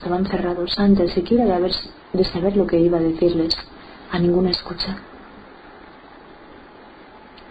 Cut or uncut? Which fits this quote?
cut